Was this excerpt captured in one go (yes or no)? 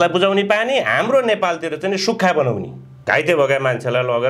no